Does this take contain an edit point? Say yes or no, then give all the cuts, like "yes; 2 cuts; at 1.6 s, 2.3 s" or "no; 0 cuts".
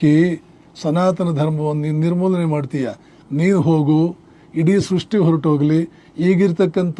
no; 0 cuts